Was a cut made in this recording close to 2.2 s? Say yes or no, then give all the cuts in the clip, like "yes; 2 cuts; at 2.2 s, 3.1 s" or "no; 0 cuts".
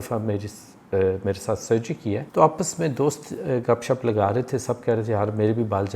yes; 1 cut; at 2.2 s